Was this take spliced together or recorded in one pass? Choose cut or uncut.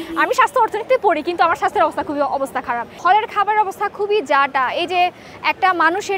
cut